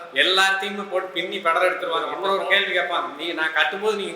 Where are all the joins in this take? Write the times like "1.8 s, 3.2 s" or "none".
2.1 s